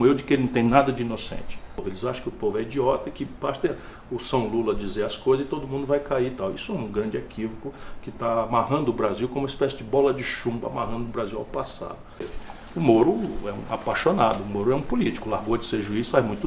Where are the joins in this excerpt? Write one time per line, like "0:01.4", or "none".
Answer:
0:01.9
0:12.4